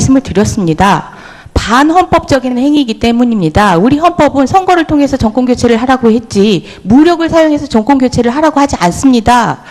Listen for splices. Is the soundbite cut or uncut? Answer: uncut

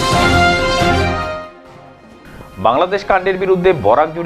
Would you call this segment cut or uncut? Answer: cut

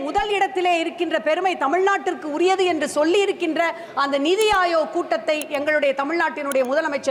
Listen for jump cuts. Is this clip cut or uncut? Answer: uncut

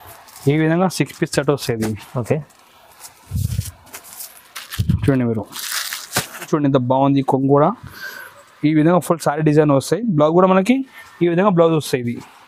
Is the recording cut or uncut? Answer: cut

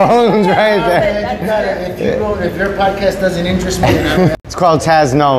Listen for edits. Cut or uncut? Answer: cut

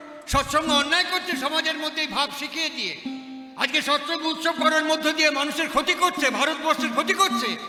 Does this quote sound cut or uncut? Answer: uncut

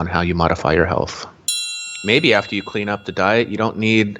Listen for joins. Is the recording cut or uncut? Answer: cut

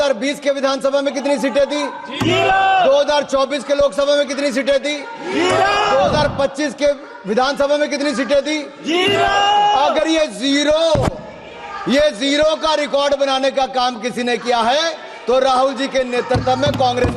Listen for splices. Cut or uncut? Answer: uncut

